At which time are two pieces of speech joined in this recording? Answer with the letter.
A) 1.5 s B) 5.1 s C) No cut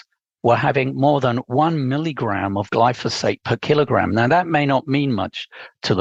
C